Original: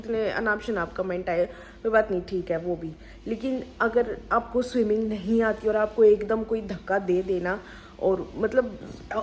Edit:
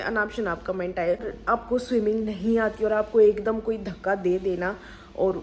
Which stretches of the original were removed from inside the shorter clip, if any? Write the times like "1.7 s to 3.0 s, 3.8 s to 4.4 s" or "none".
1.6 s to 4.2 s